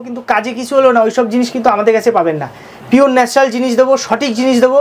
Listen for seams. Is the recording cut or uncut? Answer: uncut